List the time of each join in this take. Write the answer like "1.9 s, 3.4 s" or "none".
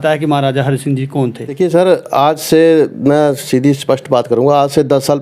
1.6 s